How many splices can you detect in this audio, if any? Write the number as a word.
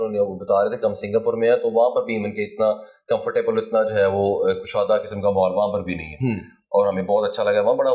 zero